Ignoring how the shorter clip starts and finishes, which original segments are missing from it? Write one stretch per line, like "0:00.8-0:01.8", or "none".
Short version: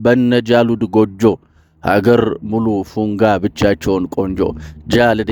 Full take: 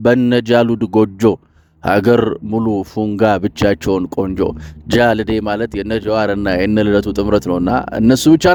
none